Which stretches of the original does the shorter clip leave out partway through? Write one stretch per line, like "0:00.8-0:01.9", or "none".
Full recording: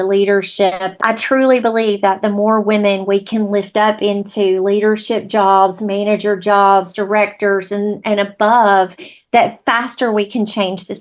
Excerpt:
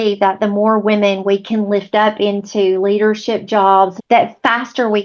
0:05.8-0:09.2